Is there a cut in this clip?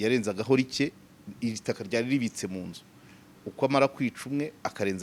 no; 0 cuts

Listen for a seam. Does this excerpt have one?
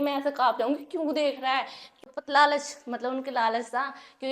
yes; 1 cut; at 2.0 s

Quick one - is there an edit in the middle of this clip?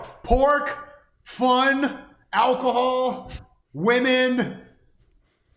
no; 0 cuts

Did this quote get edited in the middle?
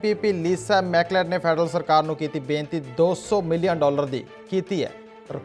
no; 0 cuts

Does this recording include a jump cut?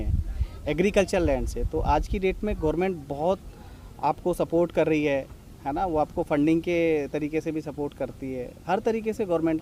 no; 0 cuts

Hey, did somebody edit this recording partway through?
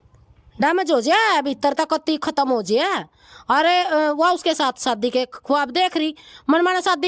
no; 0 cuts

